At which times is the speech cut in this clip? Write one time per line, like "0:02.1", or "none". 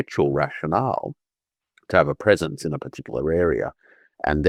none